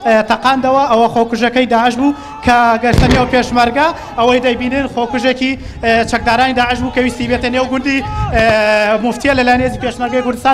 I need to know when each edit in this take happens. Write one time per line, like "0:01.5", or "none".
none